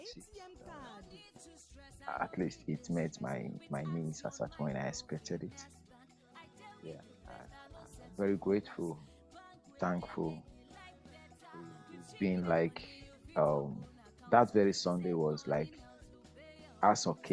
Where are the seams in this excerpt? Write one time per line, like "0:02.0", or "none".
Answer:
none